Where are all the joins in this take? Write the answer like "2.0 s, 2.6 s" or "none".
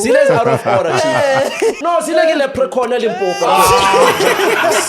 1.8 s

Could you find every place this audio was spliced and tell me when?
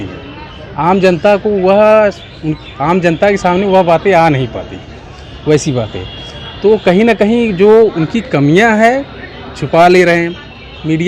none

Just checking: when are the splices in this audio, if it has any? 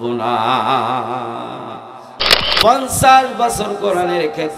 2.1 s

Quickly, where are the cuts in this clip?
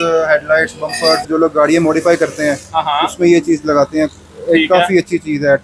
1.3 s

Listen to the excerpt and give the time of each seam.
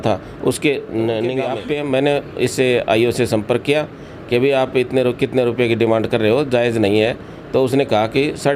1.5 s

